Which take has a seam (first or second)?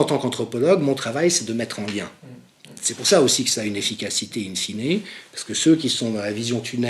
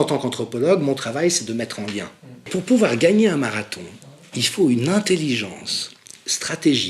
second